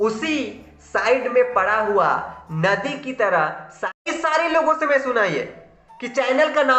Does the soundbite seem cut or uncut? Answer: cut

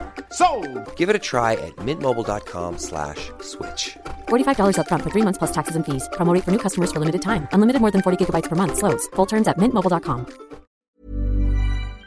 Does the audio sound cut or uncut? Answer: cut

